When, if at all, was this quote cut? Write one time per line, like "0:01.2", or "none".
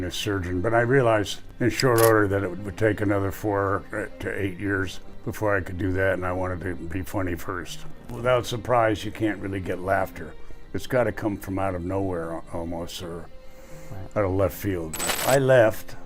0:01.4
0:05.1
0:08.0
0:15.0